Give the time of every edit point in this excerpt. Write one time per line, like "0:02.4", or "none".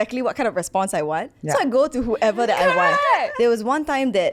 0:03.3